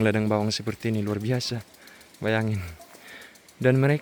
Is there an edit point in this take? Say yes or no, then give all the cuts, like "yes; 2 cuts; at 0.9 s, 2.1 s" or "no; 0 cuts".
no; 0 cuts